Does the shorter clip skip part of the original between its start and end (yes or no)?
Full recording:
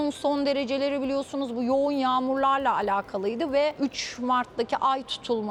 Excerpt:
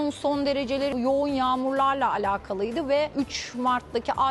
yes